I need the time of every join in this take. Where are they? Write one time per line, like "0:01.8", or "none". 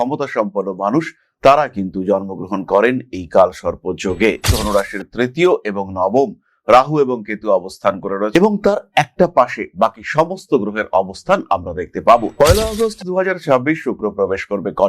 0:04.5